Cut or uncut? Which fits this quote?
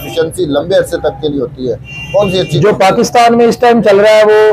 uncut